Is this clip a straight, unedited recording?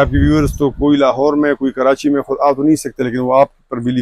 yes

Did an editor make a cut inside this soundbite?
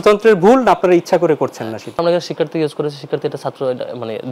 yes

